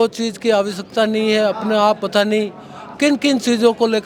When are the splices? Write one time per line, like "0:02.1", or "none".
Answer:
none